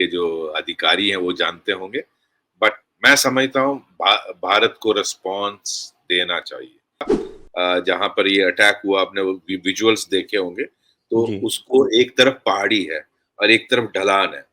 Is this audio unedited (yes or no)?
no